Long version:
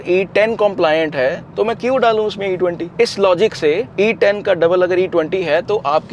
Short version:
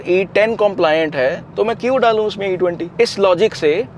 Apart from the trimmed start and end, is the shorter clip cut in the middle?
no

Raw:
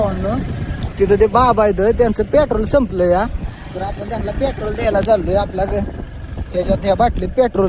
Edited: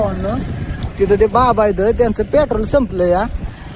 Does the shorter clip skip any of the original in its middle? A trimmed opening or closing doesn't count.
no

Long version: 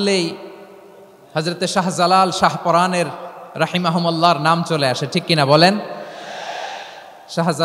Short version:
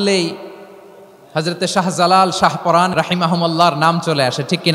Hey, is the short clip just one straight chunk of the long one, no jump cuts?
no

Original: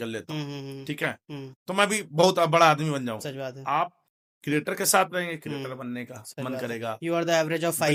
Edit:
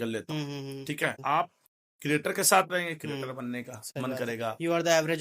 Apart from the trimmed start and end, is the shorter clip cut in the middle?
yes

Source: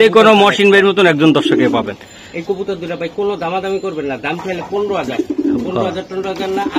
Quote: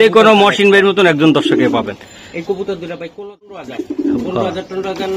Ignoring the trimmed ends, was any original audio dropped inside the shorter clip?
yes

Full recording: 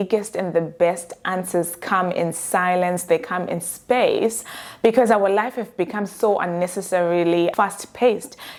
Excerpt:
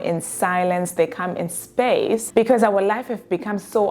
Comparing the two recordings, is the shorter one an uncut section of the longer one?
no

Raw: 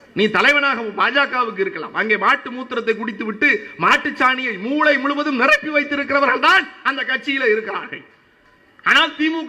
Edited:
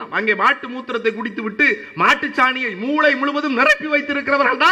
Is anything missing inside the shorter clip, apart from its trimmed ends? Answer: no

